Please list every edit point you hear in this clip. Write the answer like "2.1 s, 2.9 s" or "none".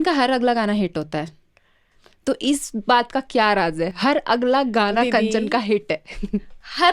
none